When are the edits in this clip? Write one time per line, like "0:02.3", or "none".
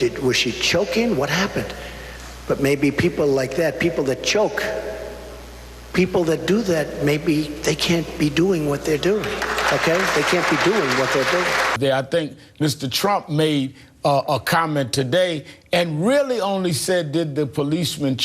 0:11.7